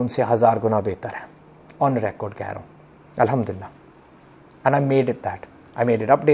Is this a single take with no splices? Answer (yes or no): yes